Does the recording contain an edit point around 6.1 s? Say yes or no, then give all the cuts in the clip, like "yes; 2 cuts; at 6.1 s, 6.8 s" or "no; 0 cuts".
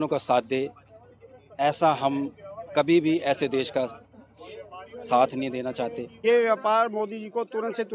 yes; 1 cut; at 6.1 s